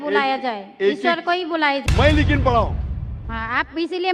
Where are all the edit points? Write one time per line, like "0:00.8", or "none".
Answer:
0:01.8